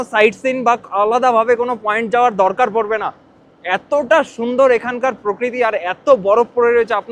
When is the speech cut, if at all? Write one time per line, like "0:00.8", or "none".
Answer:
none

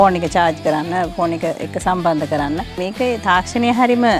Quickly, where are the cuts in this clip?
none

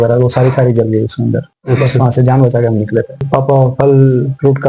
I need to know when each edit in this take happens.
0:01.5
0:03.2

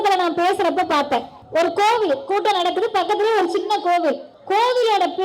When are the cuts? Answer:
0:01.4
0:04.3

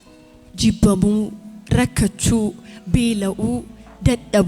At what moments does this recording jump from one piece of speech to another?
none

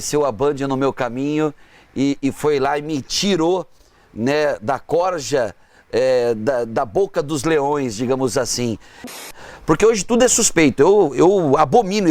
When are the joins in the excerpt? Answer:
0:09.3

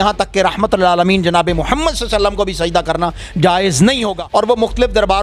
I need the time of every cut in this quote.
0:04.2

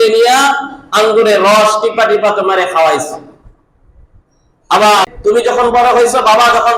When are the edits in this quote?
0:05.1

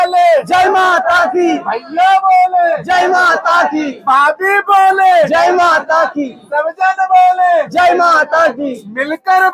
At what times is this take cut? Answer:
none

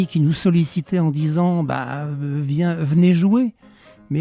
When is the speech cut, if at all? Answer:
none

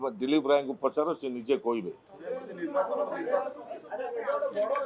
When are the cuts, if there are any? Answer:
none

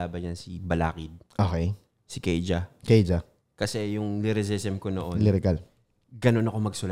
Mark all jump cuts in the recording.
none

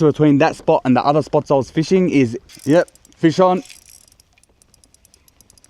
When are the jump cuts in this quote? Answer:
0:02.4

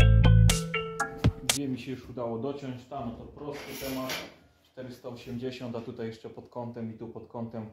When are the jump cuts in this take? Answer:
0:01.0

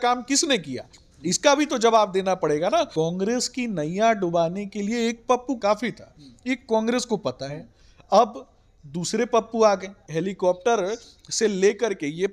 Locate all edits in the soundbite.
0:02.9
0:05.6
0:10.0

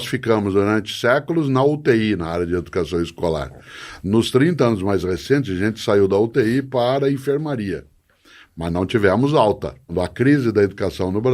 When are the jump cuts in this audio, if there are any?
0:09.9

